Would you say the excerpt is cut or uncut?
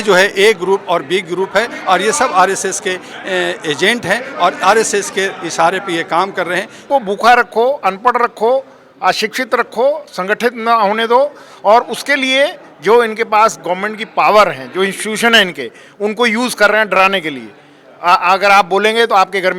cut